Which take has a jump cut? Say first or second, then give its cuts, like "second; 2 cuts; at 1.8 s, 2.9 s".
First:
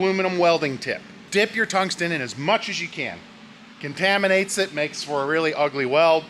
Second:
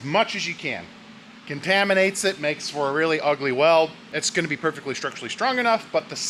first; 1 cut; at 1.1 s